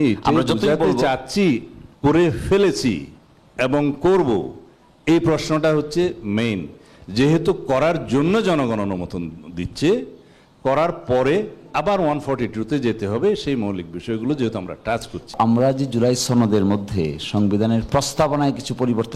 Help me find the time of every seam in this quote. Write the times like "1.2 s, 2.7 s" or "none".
15.3 s